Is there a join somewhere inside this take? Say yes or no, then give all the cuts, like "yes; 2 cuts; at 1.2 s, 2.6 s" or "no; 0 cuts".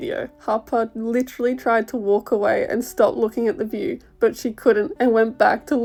no; 0 cuts